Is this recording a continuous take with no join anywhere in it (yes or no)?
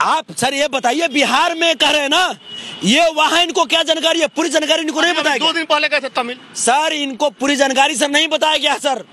yes